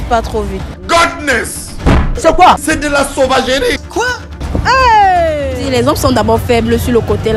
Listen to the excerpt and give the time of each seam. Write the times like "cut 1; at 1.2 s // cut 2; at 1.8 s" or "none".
cut 1; at 5.6 s